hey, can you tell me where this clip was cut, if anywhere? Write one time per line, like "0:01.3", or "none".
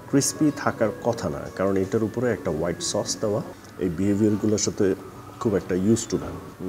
0:03.6